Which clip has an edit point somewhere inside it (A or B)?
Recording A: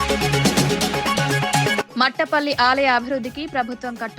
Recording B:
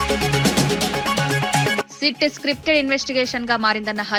A